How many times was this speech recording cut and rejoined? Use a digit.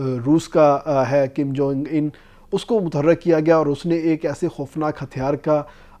0